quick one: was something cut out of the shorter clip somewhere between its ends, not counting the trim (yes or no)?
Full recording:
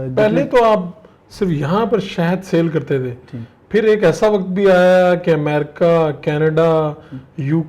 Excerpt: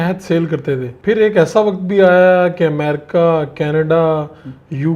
yes